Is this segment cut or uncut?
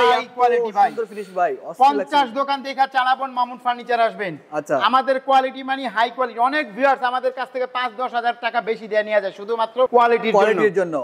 uncut